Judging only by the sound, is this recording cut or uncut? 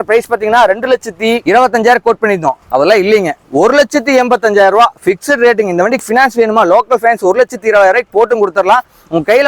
uncut